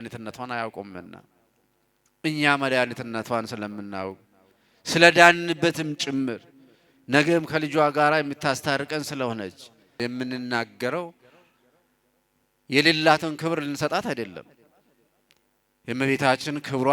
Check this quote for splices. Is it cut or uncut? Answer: cut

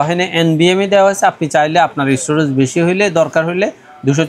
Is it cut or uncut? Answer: uncut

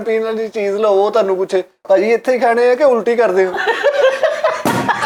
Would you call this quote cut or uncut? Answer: uncut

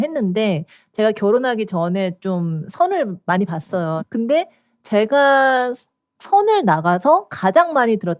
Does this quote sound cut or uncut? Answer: cut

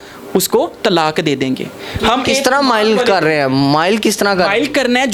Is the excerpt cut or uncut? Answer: uncut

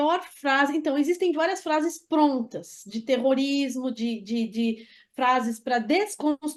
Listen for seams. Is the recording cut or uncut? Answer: uncut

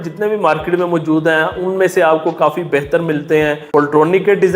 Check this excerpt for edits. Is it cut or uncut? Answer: cut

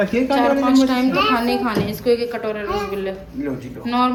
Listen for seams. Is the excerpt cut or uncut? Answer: uncut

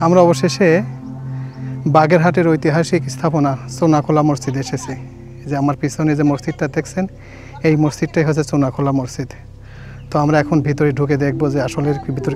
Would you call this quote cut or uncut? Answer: uncut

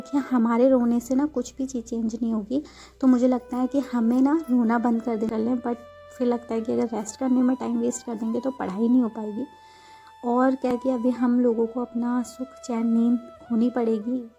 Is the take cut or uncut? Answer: cut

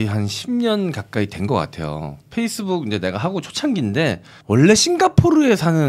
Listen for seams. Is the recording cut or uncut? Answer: uncut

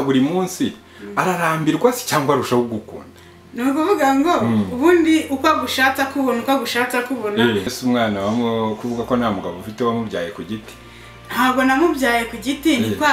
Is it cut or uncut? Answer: cut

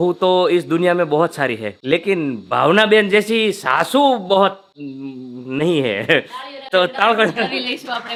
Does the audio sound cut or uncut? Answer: uncut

